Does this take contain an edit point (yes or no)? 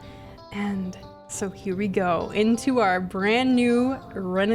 no